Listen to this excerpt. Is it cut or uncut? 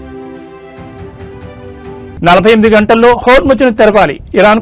uncut